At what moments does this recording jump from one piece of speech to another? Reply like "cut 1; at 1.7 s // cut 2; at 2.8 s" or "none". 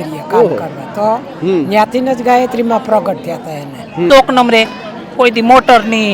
cut 1; at 4.1 s